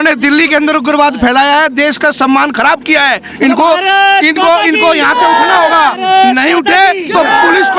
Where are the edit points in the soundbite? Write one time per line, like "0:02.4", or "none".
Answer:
none